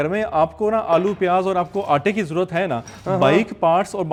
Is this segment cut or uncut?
uncut